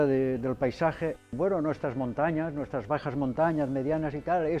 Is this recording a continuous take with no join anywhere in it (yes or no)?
no